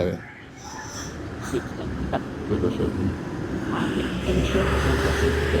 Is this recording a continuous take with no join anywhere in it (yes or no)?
yes